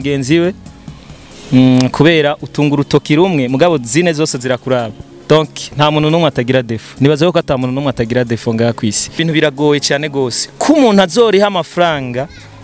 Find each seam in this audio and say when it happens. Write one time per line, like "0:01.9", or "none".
0:09.2